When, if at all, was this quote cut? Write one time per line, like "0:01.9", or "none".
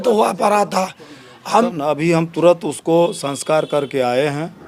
0:01.7